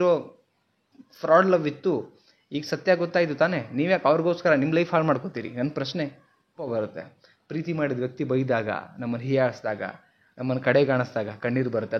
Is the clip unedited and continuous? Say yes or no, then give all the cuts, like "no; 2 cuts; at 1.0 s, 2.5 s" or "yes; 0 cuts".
no; 1 cut; at 6.7 s